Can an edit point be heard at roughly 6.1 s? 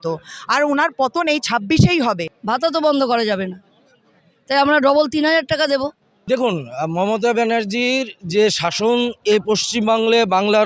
yes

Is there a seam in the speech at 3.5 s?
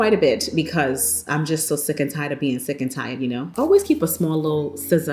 yes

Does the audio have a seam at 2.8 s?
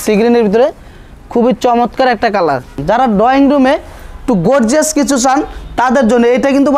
yes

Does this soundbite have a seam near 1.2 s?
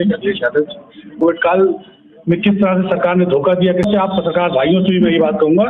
yes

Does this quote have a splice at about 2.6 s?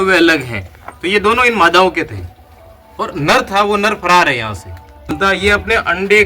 no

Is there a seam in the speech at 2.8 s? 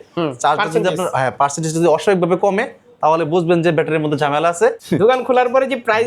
no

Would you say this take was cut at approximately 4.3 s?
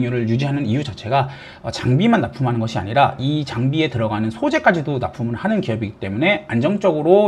no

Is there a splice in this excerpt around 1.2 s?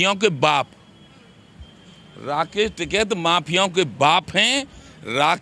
no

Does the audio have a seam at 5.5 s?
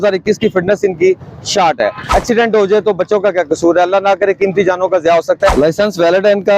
yes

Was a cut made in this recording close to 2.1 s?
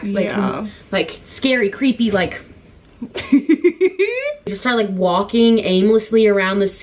no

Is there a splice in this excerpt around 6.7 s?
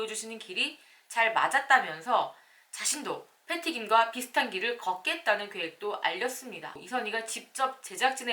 yes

